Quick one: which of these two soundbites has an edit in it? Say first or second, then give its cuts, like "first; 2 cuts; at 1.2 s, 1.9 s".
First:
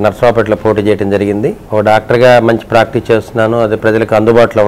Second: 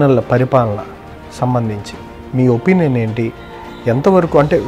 first; 1 cut; at 1.6 s